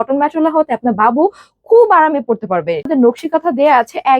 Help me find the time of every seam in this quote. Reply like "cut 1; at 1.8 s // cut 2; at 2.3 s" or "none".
cut 1; at 2.9 s